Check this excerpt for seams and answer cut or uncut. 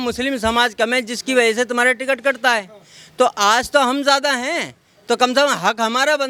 uncut